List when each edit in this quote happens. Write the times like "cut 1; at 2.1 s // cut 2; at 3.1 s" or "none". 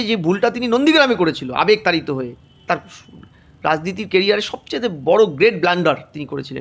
none

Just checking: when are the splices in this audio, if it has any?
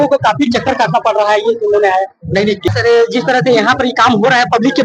cut 1; at 2.7 s

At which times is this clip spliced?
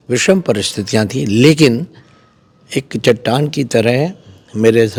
none

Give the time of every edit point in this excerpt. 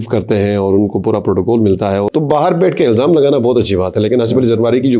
cut 1; at 2.1 s

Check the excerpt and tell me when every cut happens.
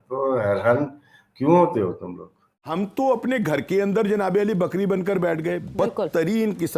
cut 1; at 2.5 s

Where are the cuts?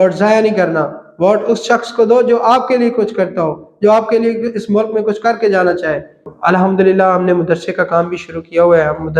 cut 1; at 6.3 s

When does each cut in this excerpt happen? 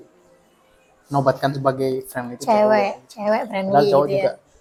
none

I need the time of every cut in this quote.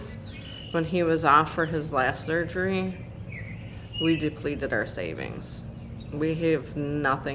none

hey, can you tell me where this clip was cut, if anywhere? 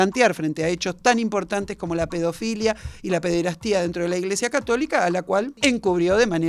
cut 1; at 5.6 s

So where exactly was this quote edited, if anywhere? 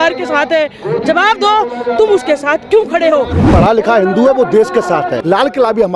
cut 1; at 3.5 s // cut 2; at 5.2 s

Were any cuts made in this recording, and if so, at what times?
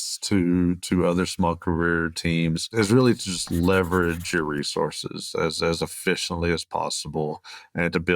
cut 1; at 2.7 s

